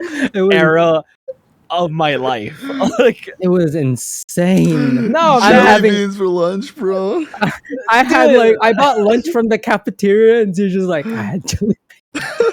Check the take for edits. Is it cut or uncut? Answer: uncut